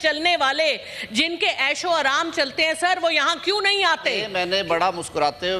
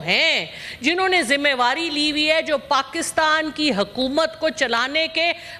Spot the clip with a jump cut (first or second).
first